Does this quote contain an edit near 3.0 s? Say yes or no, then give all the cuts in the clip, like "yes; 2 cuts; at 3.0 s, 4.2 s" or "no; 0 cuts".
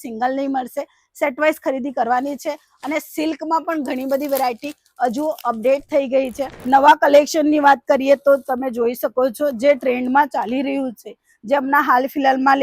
no; 1 cut; at 6.5 s